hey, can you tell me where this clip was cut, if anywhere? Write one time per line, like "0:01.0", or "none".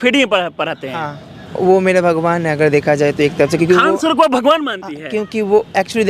0:01.4